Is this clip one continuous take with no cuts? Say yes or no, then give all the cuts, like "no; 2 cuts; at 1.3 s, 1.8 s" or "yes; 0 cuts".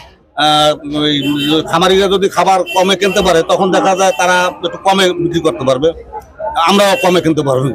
yes; 0 cuts